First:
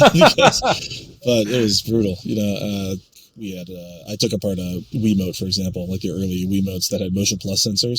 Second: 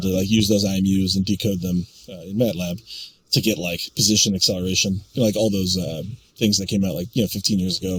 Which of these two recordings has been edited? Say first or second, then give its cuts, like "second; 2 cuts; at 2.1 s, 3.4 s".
first; 1 cut; at 3.1 s